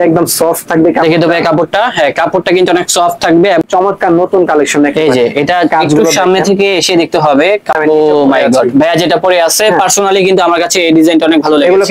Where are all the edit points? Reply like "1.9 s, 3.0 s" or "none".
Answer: 3.6 s, 7.8 s